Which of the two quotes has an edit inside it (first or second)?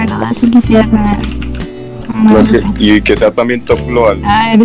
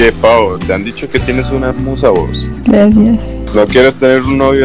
second